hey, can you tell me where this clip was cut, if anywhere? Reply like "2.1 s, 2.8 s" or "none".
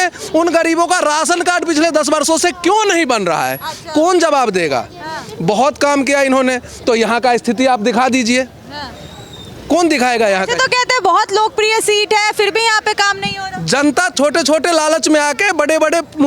none

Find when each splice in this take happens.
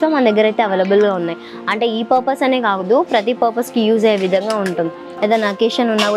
5.0 s

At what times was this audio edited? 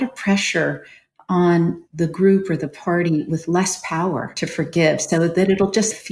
4.4 s

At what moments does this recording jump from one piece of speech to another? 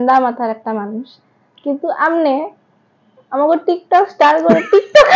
none

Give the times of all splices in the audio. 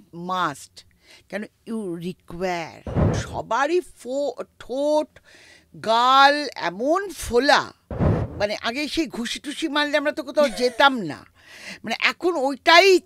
3.2 s, 8.2 s

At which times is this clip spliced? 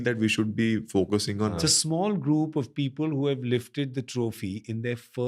1.5 s

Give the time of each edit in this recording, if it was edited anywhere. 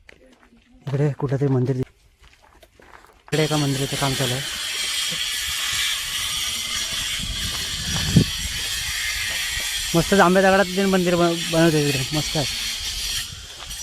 1.8 s

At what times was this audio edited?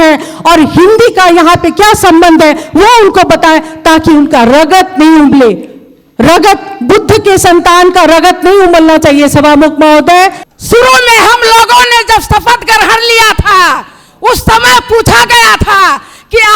10.4 s

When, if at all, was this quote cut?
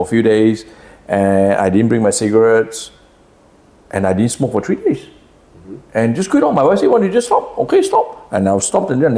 none

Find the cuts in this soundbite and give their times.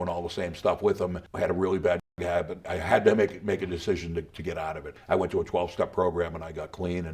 2.7 s, 4.9 s

